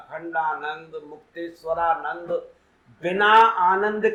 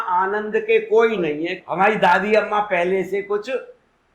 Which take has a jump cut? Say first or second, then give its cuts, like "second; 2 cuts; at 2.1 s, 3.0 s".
second; 1 cut; at 1.6 s